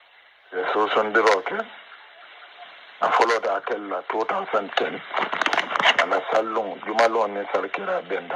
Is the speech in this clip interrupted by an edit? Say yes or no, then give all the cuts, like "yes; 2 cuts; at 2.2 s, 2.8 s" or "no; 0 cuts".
yes; 1 cut; at 5.3 s